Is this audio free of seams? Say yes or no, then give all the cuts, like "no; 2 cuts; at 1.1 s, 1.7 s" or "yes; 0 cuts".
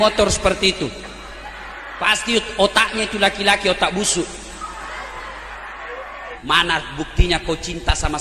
no; 1 cut; at 6.3 s